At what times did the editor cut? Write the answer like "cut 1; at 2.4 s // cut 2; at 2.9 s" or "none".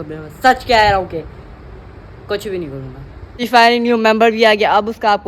cut 1; at 3.4 s